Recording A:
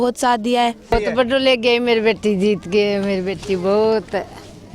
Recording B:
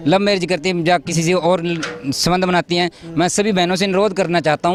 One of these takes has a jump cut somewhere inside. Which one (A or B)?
A